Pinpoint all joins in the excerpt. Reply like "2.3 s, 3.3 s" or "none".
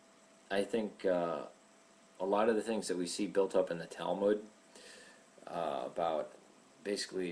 none